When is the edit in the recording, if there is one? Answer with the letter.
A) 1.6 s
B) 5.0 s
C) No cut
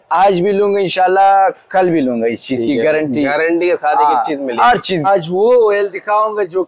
B